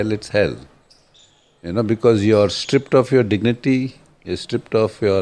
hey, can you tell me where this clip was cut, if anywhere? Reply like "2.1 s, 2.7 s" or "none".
4.2 s